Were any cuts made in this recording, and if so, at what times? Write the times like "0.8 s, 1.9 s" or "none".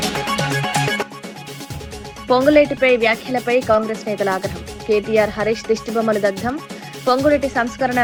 none